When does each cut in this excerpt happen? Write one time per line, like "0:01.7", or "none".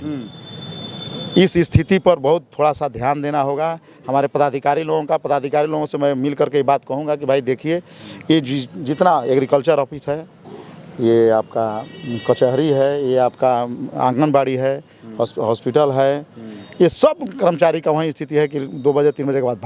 none